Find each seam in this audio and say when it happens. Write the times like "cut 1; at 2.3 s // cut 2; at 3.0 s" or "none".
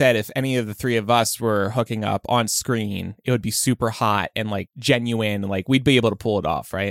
none